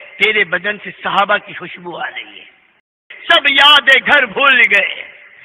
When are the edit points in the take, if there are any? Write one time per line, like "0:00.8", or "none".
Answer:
0:03.0